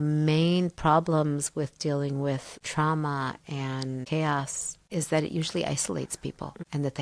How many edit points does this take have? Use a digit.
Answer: 0